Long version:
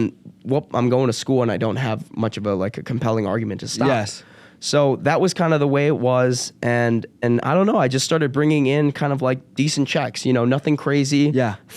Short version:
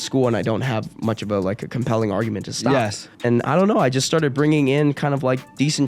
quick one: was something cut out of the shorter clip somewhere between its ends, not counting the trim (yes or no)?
yes